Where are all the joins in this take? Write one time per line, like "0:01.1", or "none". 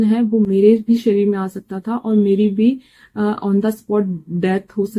none